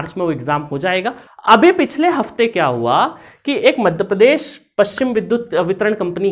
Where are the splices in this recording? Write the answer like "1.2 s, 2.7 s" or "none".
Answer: 1.2 s

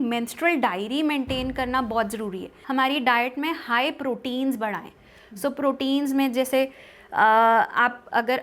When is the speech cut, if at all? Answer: 2.5 s

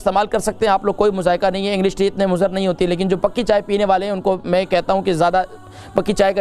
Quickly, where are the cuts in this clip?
none

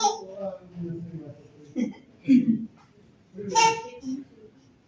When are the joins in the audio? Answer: none

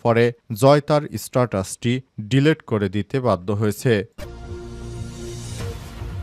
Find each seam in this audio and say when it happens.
4.1 s

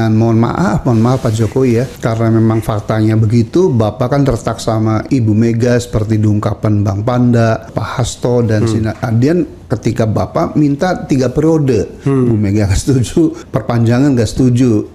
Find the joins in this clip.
1.9 s, 5.0 s, 7.8 s, 9.6 s, 13.4 s

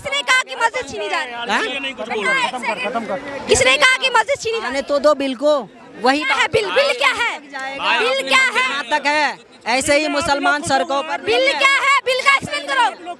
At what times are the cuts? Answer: none

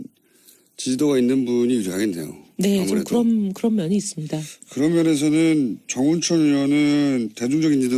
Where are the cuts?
5.0 s

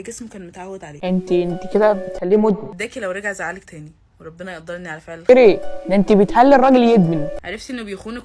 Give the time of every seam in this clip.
1.0 s

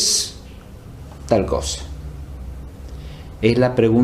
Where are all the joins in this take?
1.3 s

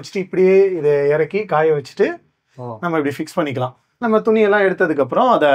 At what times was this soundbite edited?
3.9 s

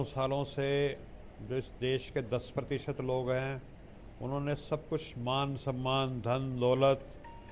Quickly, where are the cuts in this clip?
none

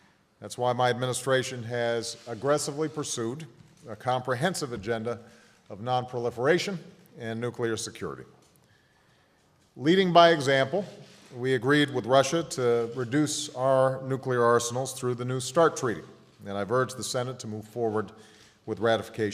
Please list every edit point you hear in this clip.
14.0 s

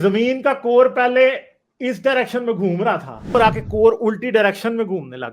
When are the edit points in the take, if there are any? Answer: 3.3 s

